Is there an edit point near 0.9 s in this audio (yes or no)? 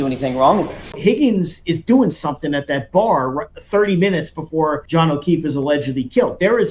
yes